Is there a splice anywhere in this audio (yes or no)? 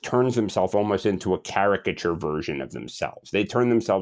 no